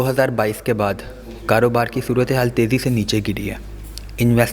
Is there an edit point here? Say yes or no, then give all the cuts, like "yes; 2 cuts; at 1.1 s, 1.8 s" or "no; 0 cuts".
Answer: no; 0 cuts